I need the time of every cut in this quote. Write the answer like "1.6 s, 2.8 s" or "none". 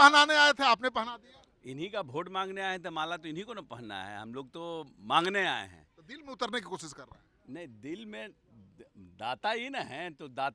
none

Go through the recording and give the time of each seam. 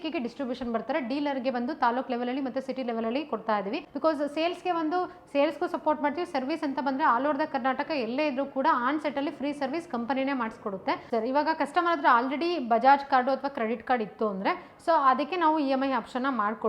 3.9 s, 11.0 s

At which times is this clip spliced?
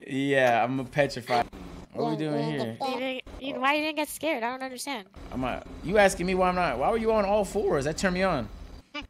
1.4 s

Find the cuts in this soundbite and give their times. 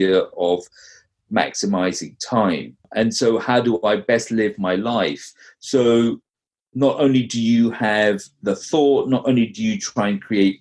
2.8 s

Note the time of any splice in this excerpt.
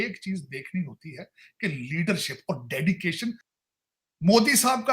3.4 s

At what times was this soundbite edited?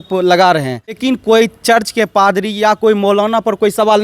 1.0 s

